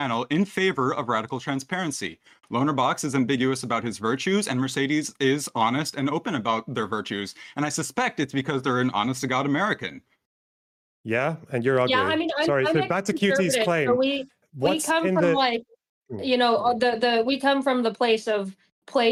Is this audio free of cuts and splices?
yes; 0 cuts

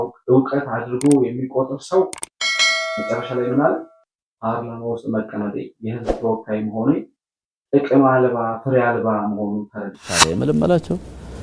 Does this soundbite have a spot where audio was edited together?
yes; 1 cut; at 10.2 s

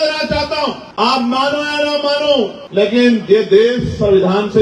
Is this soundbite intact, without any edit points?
no; 2 cuts; at 0.8 s, 2.6 s

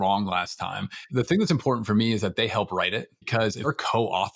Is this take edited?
yes; 2 cuts; at 1.1 s, 3.7 s

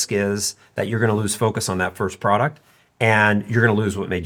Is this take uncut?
yes; 0 cuts

